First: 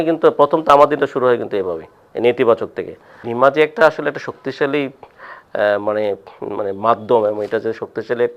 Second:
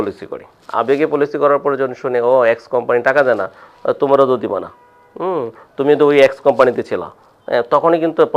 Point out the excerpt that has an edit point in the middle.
first; 1 cut; at 3.2 s

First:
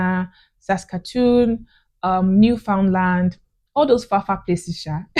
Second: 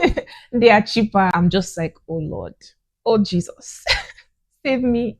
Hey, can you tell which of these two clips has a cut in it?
second; 1 cut; at 1.3 s

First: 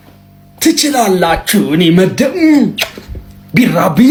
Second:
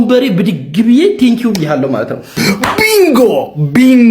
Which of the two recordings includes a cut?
second; 1 cut; at 2.3 s

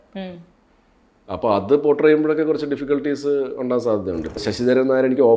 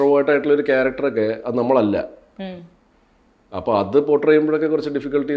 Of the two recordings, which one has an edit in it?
first; 1 cut; at 4.4 s

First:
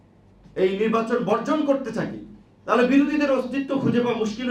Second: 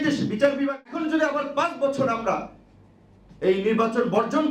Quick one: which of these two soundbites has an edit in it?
second; 1 cut; at 1.0 s

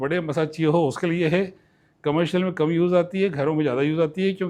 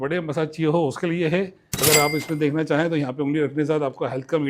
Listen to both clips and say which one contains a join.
second; 1 cut; at 1.6 s

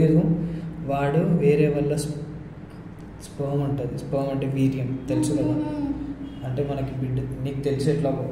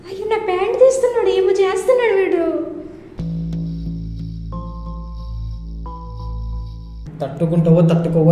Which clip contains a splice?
second; 1 cut; at 7.1 s

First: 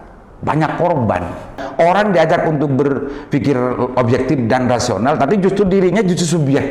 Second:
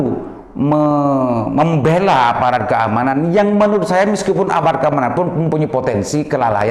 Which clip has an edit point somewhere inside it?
first; 1 cut; at 1.6 s

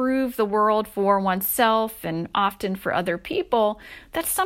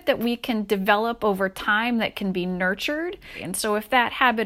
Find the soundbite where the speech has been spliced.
second; 1 cut; at 3.4 s

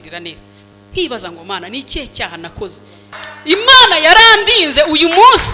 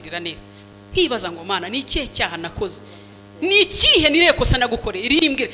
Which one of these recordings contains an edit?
first; 1 cut; at 3.2 s

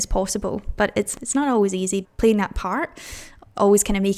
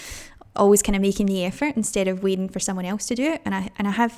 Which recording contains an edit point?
first; 2 cuts; at 1.1 s, 2.1 s

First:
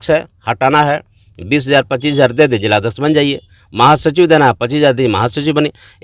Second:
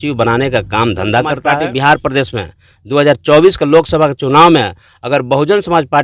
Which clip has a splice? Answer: second; 1 cut; at 1.5 s

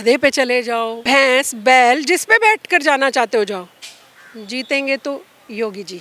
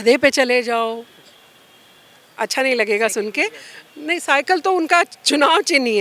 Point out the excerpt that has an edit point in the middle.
first; 1 cut; at 1.0 s

